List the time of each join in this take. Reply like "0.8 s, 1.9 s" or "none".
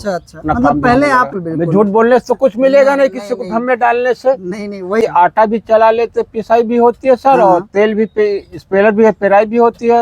1.3 s, 5.0 s